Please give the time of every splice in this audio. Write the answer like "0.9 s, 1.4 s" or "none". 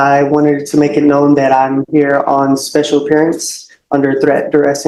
none